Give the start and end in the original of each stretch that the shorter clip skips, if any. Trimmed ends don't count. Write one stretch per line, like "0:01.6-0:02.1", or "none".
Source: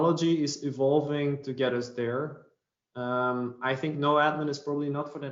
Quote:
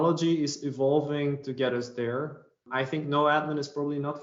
0:02.6-0:03.6